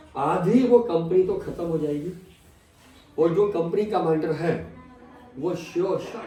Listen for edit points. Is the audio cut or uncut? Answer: uncut